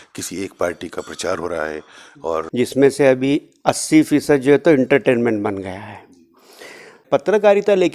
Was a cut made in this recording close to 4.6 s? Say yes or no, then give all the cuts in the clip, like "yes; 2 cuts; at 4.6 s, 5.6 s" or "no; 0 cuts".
no; 2 cuts; at 2.4 s, 7.0 s